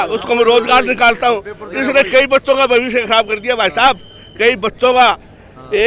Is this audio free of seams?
yes; 0 cuts

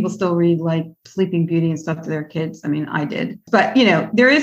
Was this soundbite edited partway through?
no; 0 cuts

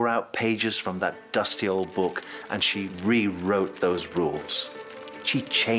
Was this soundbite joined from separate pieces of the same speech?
yes; 1 cut; at 2.9 s

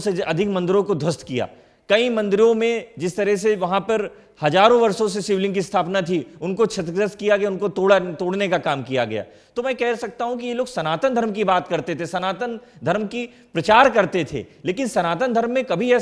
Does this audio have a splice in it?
no; 0 cuts

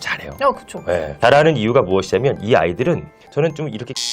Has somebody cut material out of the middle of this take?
yes; 1 cut; at 3.1 s

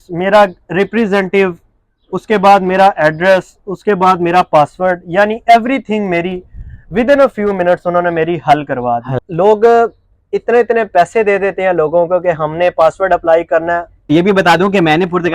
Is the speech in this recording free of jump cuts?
no; 2 cuts; at 9.2 s, 14.0 s

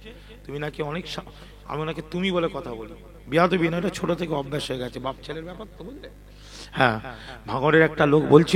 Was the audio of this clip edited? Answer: no; 0 cuts

